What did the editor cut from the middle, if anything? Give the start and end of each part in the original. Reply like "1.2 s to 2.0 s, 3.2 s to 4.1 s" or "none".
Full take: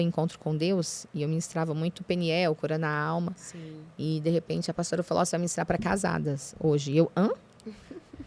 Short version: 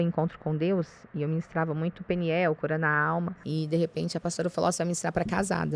3.4 s to 3.9 s